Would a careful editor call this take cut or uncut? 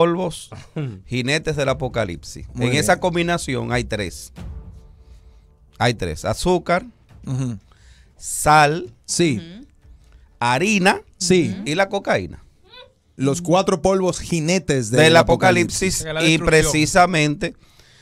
uncut